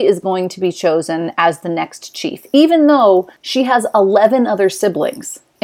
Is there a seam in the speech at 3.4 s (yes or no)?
yes